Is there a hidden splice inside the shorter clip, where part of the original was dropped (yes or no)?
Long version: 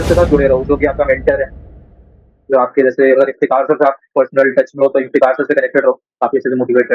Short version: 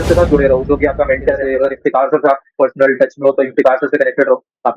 yes